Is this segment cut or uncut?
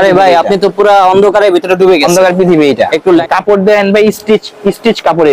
cut